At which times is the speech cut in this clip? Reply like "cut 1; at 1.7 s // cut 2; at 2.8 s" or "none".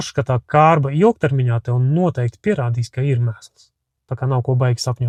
none